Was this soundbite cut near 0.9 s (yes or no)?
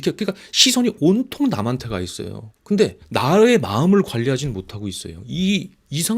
no